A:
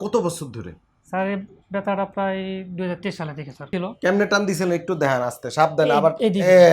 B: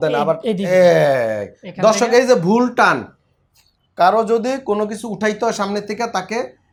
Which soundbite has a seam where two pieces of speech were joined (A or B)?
A